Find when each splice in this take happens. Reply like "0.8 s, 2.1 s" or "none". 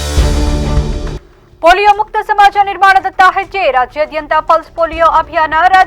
1.1 s